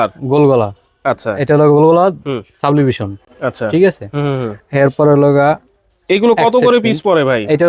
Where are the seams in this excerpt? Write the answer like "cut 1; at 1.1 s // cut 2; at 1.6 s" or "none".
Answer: none

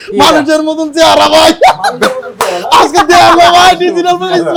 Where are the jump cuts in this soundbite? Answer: none

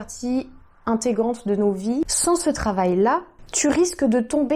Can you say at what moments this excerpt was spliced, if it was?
cut 1; at 2.1 s

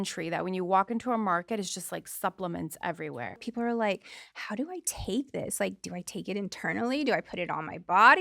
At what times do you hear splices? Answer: cut 1; at 3.4 s

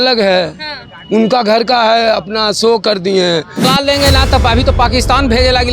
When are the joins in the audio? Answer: cut 1; at 3.6 s

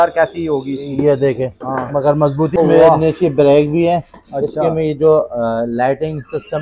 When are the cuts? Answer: cut 1; at 2.6 s

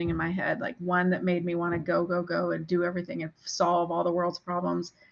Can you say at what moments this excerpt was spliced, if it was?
none

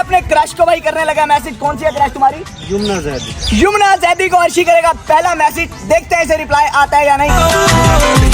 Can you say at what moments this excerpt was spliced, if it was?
none

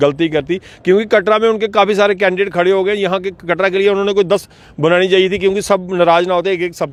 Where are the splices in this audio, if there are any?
none

